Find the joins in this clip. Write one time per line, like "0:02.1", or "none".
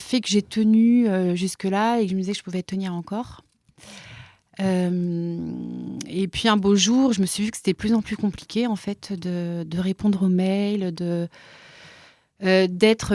none